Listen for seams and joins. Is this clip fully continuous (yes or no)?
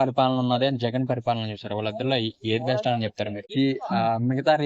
no